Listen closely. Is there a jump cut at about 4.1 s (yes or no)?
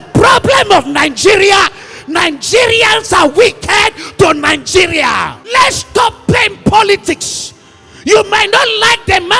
no